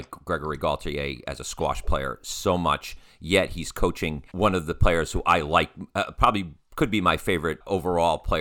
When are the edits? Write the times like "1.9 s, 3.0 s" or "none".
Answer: 4.2 s, 7.6 s